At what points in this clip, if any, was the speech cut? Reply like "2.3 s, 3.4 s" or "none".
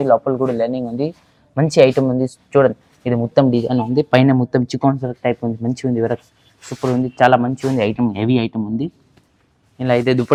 none